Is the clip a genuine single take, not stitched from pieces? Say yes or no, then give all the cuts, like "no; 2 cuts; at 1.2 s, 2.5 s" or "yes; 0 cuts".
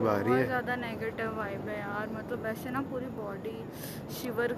yes; 0 cuts